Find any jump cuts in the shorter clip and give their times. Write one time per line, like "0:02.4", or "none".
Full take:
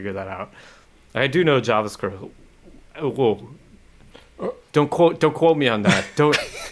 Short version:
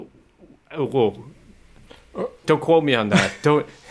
0:02.4